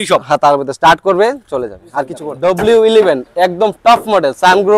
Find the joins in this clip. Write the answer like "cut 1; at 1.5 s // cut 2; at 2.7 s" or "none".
cut 1; at 2.2 s